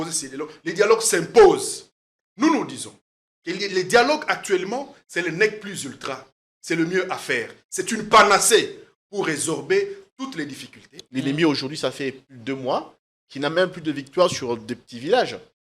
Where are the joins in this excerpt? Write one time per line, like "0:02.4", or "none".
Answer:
0:11.0